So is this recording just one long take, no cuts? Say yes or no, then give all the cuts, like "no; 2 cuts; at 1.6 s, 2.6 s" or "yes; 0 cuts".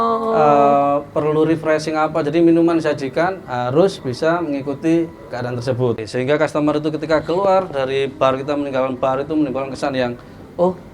no; 1 cut; at 6.1 s